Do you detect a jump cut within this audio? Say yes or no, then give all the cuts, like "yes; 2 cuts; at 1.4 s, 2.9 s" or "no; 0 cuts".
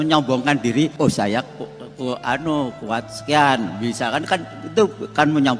yes; 1 cut; at 0.9 s